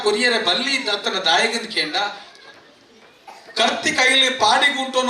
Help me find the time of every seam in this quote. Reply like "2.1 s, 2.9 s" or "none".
2.3 s